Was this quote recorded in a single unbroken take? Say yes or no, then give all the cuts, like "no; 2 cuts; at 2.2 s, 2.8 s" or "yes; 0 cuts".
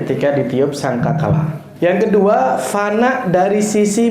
no; 1 cut; at 1.6 s